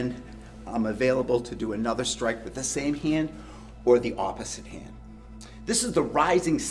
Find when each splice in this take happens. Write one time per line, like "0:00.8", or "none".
none